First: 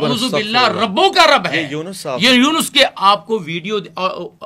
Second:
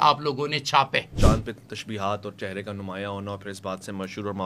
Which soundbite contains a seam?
second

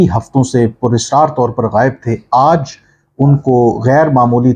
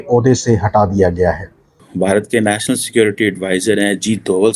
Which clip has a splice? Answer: second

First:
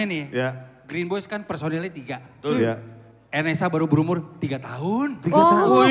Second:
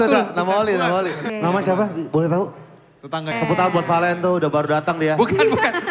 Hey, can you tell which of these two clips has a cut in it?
second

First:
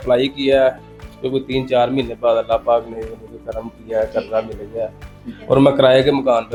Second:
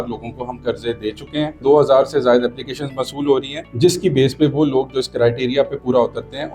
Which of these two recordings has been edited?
second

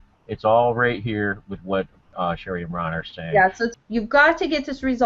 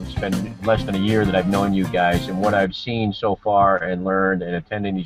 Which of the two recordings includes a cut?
first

